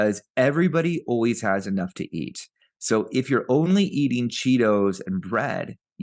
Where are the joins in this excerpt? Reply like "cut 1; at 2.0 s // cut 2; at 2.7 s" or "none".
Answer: none